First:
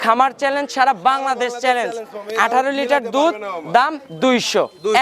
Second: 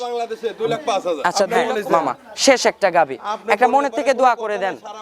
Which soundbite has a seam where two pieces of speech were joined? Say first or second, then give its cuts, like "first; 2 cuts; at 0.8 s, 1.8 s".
second; 1 cut; at 1.5 s